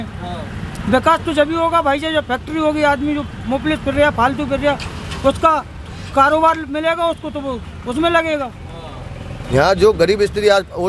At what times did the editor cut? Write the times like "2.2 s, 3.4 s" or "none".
9.4 s